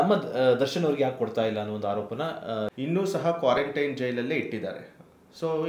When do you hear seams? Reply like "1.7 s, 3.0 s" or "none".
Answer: 2.7 s